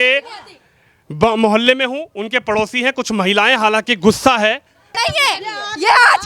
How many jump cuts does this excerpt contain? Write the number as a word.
one